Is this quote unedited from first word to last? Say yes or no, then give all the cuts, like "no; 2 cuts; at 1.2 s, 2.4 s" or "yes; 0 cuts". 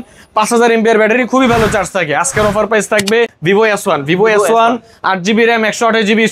no; 1 cut; at 3.4 s